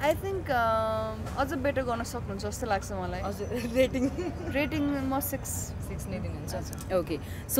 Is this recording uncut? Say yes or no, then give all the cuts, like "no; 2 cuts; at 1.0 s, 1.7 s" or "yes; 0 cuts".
yes; 0 cuts